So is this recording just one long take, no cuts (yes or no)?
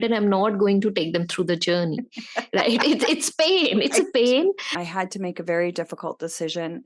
no